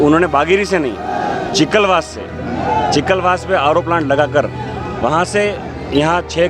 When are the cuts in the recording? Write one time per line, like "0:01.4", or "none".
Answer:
none